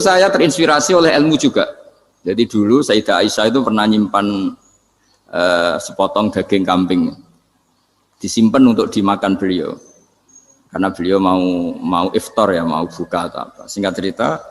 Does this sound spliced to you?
no; 0 cuts

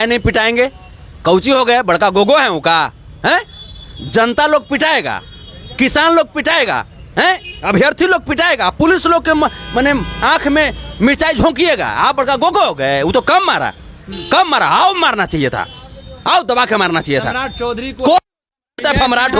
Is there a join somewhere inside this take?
no; 0 cuts

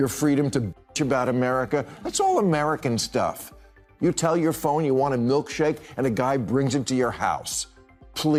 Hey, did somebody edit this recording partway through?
no; 0 cuts

